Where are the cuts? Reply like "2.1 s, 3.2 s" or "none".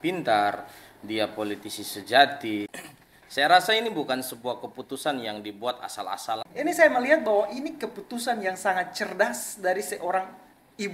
2.8 s, 6.5 s